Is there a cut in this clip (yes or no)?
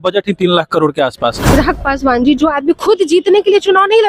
yes